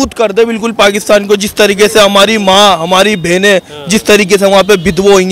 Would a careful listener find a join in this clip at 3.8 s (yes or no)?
no